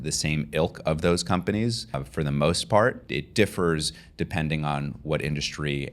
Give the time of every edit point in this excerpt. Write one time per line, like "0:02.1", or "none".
0:02.0
0:03.0